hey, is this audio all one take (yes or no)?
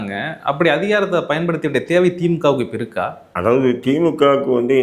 yes